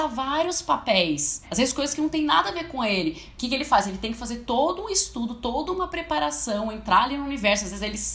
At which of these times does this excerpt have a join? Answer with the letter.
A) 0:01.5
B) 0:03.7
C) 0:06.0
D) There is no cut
A